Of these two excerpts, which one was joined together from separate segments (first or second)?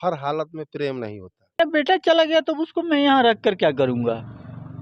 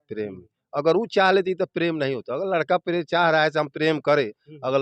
first